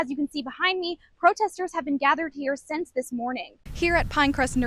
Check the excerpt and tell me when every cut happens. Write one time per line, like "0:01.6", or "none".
0:03.6